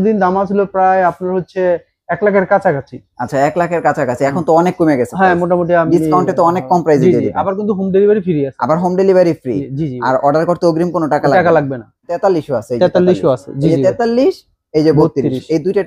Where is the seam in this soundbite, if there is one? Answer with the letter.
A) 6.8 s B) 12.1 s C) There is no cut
B